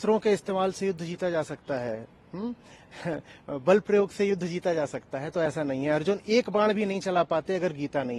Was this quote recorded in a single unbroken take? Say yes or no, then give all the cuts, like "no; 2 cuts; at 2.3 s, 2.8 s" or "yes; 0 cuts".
yes; 0 cuts